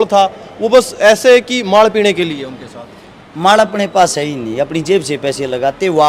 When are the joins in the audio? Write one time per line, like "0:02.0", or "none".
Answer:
none